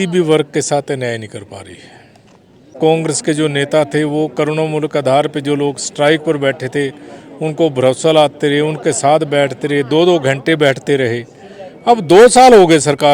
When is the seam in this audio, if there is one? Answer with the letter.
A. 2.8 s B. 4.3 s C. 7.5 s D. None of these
A